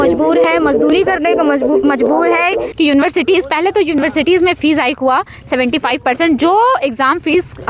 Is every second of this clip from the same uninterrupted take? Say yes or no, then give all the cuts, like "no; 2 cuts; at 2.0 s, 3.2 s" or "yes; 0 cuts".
no; 1 cut; at 2.7 s